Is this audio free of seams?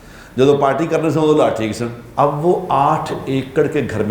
no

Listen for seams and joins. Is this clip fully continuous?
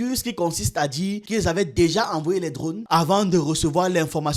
yes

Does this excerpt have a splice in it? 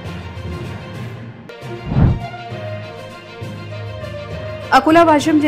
yes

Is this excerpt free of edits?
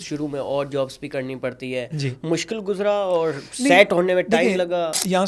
yes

